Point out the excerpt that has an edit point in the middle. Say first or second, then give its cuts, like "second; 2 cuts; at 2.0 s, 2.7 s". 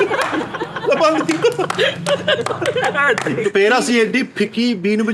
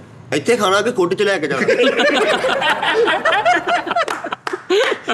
first; 1 cut; at 3.4 s